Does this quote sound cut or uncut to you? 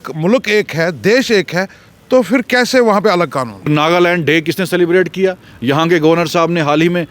cut